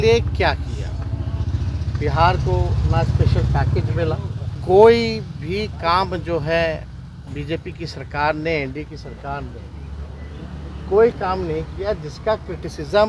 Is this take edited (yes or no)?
yes